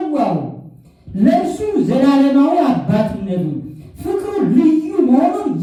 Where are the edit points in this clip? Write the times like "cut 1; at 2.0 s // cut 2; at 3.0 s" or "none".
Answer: none